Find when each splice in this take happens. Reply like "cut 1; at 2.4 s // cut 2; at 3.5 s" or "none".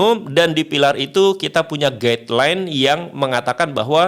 none